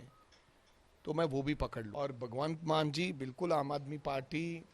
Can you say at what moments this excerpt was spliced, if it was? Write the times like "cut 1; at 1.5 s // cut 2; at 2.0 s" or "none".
cut 1; at 1.8 s

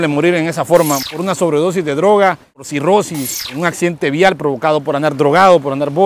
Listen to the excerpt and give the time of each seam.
cut 1; at 1.0 s // cut 2; at 2.7 s // cut 3; at 3.5 s

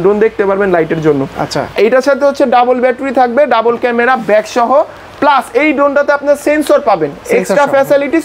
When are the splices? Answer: none

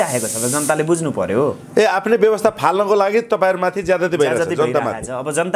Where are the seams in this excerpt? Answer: none

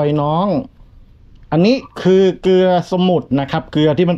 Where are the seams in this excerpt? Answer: none

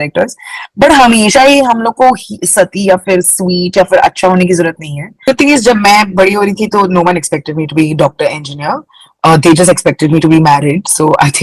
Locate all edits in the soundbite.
cut 1; at 5.2 s

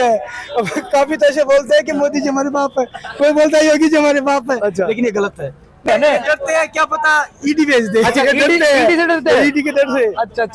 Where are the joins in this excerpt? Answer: cut 1; at 5.9 s

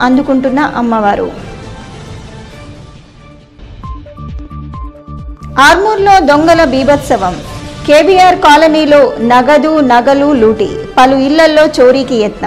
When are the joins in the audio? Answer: none

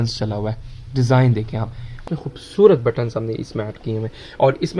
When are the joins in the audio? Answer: cut 1; at 2.0 s

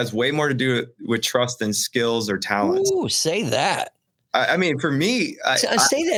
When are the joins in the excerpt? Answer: none

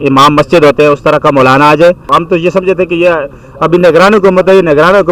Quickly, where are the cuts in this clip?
cut 1; at 2.1 s

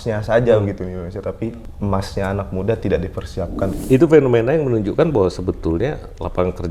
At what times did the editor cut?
cut 1; at 1.7 s // cut 2; at 3.8 s

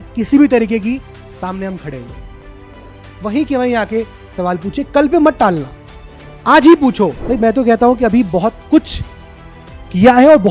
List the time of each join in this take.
cut 1; at 7.2 s

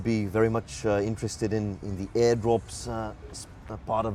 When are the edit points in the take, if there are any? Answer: none

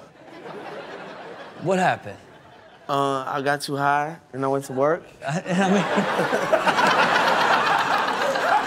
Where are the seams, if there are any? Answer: cut 1; at 6.4 s

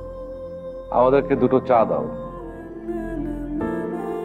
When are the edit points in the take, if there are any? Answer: cut 1; at 2.7 s

